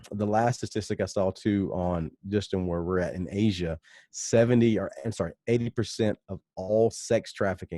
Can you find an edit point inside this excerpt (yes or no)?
no